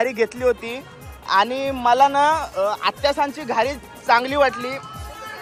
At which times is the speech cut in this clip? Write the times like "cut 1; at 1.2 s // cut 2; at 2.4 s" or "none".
none